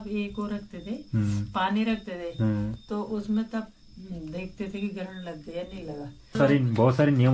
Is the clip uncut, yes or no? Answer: no